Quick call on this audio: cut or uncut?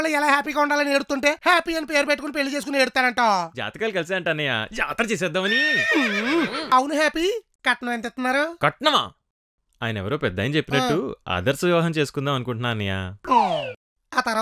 cut